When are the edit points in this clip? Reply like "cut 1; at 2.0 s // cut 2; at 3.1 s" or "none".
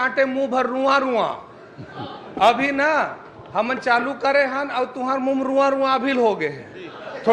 none